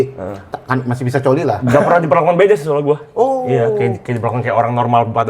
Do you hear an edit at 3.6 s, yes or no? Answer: no